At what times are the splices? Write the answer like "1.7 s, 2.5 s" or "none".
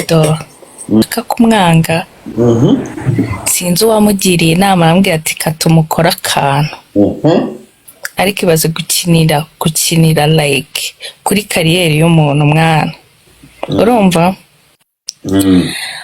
1.0 s